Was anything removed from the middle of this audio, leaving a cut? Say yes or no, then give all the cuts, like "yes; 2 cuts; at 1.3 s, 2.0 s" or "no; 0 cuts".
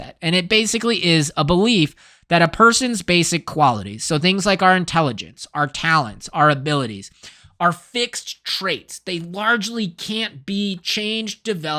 no; 0 cuts